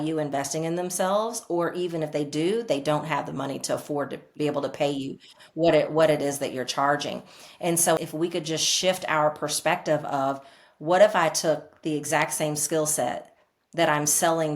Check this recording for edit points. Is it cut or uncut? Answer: cut